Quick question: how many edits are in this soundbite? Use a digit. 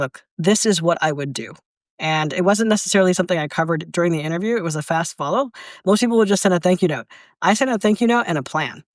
0